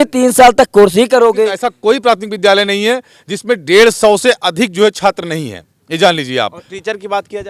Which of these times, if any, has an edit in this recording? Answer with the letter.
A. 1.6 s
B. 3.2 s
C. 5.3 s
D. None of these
A